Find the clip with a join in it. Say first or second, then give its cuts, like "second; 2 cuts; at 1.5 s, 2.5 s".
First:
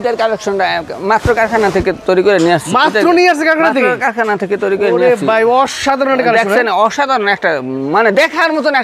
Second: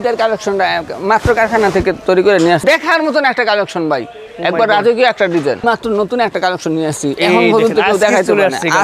second; 2 cuts; at 2.6 s, 5.6 s